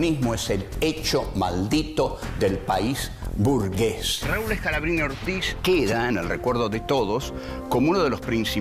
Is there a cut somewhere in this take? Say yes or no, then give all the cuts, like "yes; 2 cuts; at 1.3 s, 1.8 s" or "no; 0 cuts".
yes; 1 cut; at 5.0 s